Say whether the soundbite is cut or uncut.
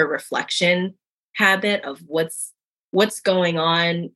uncut